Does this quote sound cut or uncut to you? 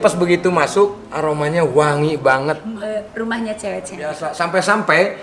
cut